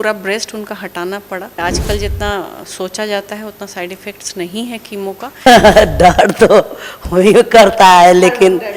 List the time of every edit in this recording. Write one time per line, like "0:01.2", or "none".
0:01.6
0:05.4